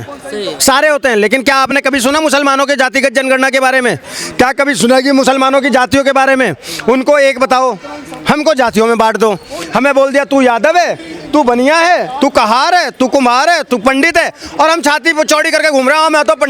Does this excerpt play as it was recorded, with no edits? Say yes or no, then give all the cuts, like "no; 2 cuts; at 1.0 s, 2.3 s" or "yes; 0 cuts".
yes; 0 cuts